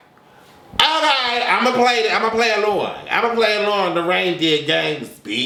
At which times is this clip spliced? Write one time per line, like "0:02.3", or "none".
none

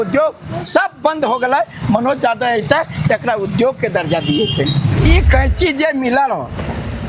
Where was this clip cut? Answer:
0:05.0

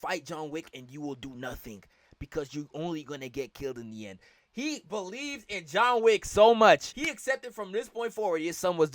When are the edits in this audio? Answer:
0:07.0

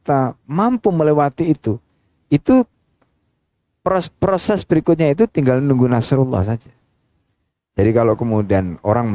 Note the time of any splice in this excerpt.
none

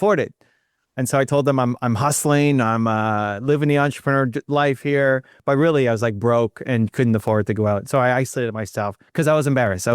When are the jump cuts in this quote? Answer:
0:05.3

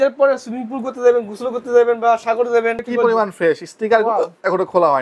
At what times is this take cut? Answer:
0:02.8

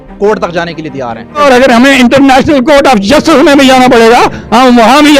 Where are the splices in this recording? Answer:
0:01.4

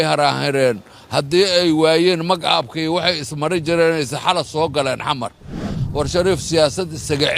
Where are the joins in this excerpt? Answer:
0:05.7

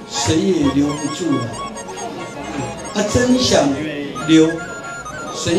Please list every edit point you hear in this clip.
none

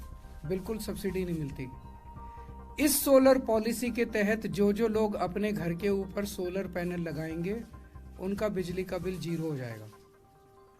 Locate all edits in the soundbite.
0:09.9

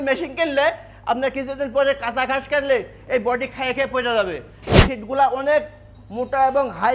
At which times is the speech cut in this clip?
0:04.7

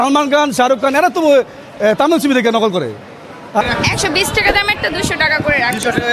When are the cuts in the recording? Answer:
0:03.6

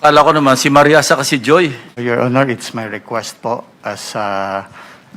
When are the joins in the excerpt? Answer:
0:01.9

